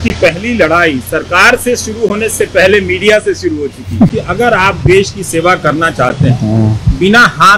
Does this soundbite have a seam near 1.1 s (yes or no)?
no